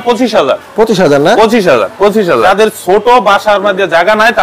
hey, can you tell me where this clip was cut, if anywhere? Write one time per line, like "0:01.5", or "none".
0:02.5